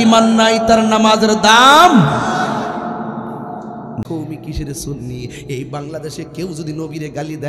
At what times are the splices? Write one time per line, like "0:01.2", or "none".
0:04.0